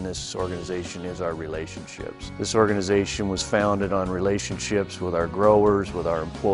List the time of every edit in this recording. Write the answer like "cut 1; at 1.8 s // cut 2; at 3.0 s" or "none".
cut 1; at 2.3 s